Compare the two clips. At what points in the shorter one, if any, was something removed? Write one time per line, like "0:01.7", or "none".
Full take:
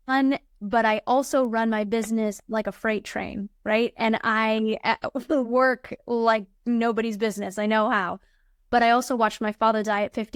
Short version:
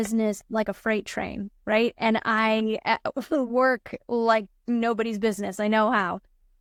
none